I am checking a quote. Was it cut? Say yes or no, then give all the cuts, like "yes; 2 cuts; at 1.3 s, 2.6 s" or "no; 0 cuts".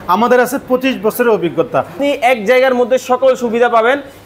yes; 1 cut; at 1.9 s